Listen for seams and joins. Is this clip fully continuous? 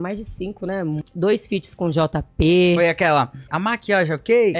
no; 2 cuts; at 1.0 s, 3.5 s

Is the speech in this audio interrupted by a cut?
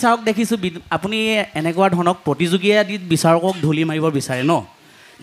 no; 0 cuts

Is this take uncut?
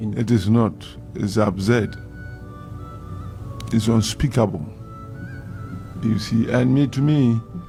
yes; 0 cuts

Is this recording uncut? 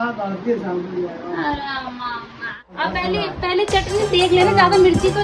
no; 1 cut; at 2.7 s

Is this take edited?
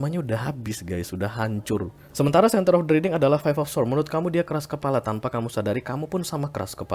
yes; 1 cut; at 2.0 s

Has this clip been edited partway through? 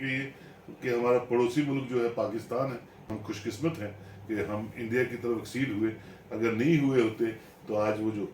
yes; 1 cut; at 3.0 s

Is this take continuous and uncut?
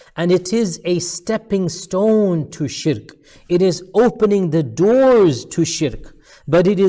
yes; 0 cuts

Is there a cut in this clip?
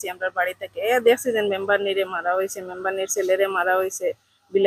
no; 0 cuts

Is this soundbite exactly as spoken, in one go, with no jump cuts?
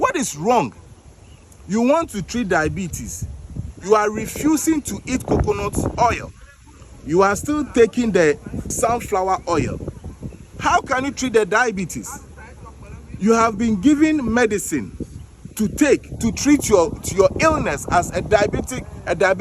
no; 1 cut; at 8.7 s

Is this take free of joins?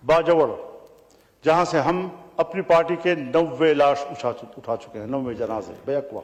yes; 0 cuts

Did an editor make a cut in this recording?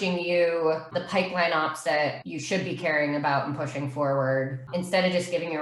yes; 3 cuts; at 1.0 s, 2.3 s, 4.7 s

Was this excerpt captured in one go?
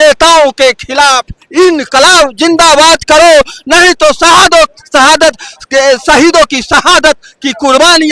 yes; 0 cuts

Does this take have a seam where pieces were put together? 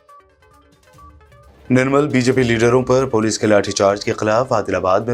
no; 0 cuts

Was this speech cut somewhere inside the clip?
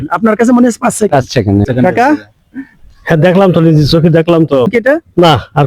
yes; 2 cuts; at 1.7 s, 4.7 s

